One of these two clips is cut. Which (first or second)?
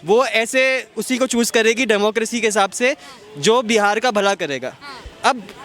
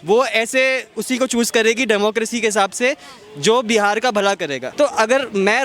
second